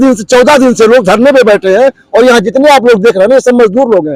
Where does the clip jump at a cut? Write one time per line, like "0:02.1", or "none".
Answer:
none